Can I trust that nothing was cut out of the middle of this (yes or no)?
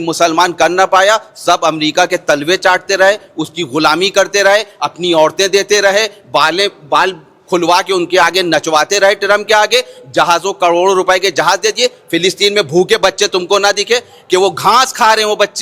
yes